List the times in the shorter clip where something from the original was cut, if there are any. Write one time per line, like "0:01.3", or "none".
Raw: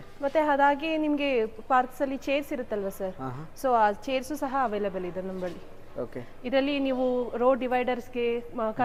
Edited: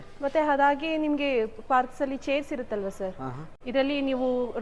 0:03.5